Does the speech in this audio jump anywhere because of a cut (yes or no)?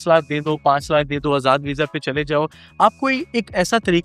no